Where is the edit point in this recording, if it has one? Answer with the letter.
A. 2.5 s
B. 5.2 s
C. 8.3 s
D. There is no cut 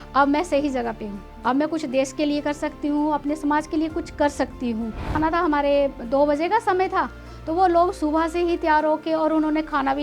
B